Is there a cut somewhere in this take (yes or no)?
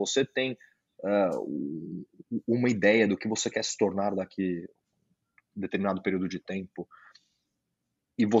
no